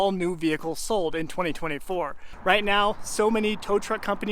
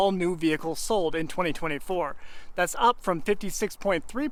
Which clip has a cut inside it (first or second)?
first